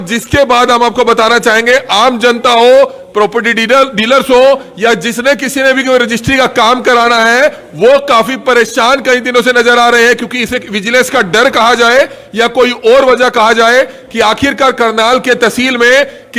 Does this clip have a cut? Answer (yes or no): no